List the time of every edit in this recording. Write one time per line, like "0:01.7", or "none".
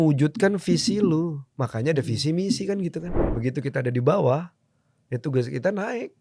0:03.2